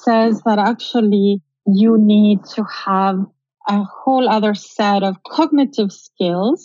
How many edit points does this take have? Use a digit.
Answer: 1